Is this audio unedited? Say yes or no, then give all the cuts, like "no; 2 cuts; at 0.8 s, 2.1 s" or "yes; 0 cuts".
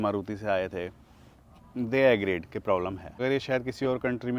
no; 1 cut; at 3.1 s